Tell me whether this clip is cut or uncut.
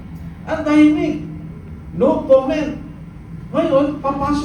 uncut